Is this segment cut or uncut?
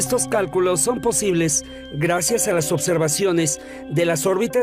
cut